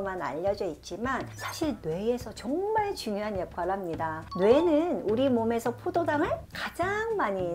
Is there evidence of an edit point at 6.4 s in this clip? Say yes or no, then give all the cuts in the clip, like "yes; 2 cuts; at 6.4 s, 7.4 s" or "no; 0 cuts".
no; 0 cuts